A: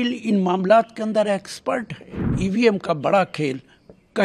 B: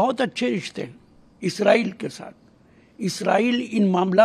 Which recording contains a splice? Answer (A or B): A